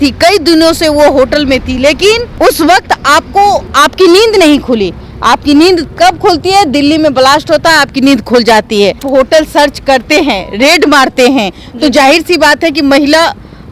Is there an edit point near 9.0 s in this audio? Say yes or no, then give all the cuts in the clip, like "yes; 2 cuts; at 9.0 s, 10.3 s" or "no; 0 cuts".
yes; 3 cuts; at 2.3 s, 3.7 s, 9.0 s